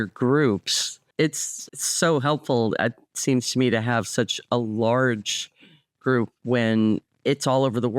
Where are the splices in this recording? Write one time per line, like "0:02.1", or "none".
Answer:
0:01.5
0:07.1